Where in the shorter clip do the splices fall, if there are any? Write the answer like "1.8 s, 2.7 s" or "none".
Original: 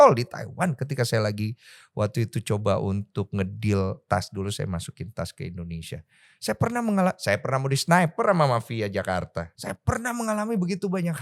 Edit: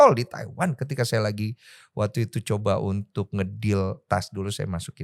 none